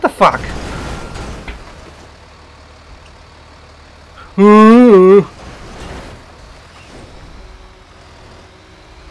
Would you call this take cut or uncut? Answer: uncut